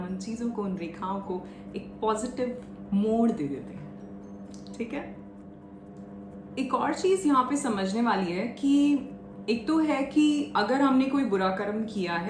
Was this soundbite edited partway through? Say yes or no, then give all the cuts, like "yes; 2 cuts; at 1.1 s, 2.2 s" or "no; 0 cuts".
no; 0 cuts